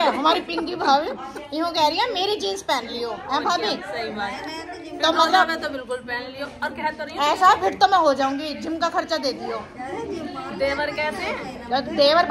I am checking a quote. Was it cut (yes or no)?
no